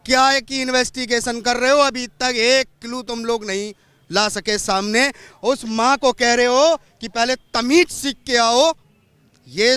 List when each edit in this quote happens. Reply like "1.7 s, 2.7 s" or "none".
none